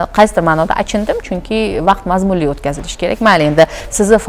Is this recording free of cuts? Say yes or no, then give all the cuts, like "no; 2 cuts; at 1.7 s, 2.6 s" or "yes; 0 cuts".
yes; 0 cuts